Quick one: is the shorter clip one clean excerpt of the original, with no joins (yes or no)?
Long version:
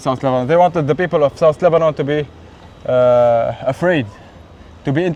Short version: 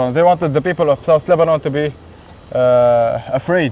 yes